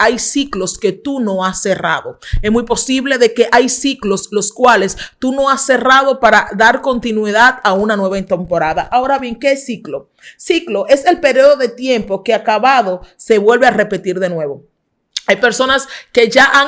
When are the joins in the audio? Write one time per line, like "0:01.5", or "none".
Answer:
none